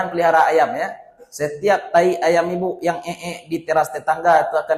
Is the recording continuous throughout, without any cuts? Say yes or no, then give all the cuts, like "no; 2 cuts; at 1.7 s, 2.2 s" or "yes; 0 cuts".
yes; 0 cuts